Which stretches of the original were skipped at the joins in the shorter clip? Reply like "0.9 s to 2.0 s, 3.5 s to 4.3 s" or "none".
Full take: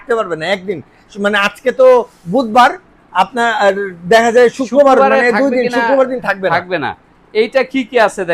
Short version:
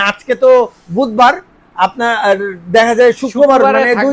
none

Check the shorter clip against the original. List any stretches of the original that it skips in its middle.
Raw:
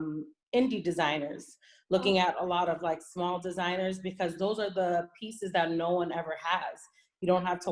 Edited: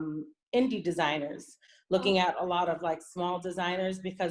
none

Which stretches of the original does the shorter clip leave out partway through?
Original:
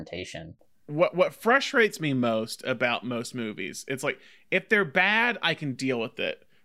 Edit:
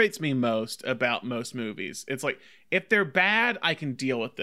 none

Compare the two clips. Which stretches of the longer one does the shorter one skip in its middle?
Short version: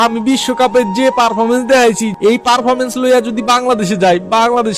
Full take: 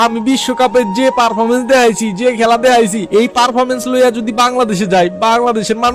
2.1 s to 3.0 s

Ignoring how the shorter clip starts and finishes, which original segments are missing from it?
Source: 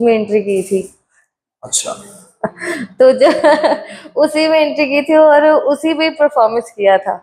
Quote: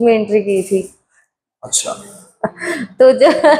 none

